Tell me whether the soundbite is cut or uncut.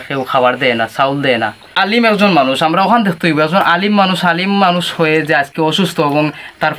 cut